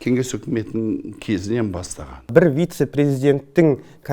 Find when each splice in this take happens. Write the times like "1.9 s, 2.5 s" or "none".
2.3 s